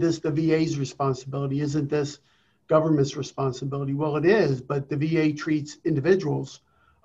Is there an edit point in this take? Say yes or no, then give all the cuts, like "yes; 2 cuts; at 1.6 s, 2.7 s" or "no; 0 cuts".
no; 0 cuts